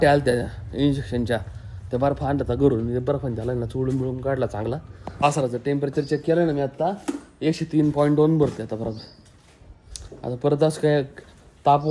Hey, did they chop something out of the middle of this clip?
yes; 1 cut; at 5.0 s

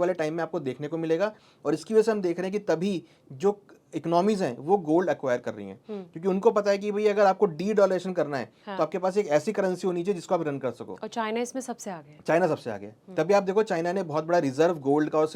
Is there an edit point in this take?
no; 0 cuts

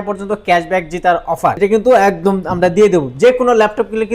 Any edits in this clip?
yes; 1 cut; at 1.6 s

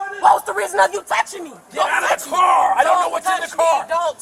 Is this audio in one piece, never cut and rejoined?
yes; 0 cuts

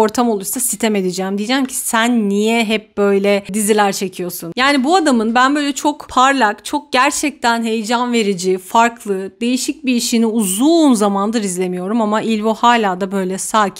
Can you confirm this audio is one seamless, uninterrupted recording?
yes; 0 cuts

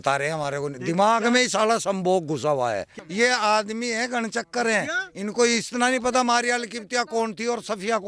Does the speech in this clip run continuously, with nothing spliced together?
no; 1 cut; at 2.9 s

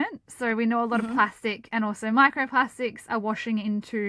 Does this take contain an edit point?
no; 0 cuts

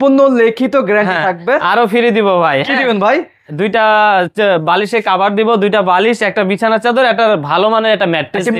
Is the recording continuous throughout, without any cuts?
yes; 0 cuts

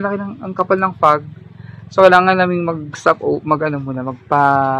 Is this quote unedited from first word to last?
yes; 0 cuts

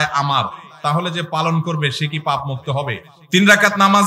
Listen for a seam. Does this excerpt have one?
yes; 1 cut; at 3.1 s

